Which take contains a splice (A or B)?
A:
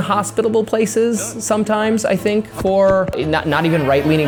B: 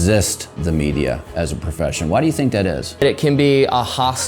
B